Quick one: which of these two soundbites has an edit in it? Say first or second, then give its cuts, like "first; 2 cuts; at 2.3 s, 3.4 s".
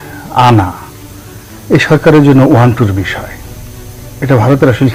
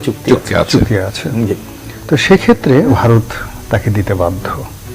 second; 1 cut; at 2.9 s